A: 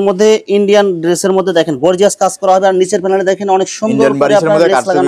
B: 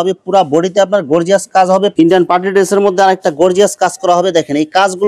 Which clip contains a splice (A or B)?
B